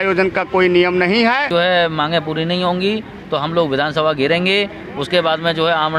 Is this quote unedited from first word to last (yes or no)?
no